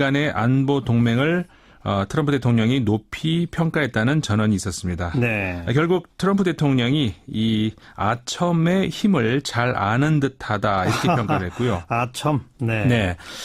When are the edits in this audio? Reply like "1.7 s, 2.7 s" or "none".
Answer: 9.7 s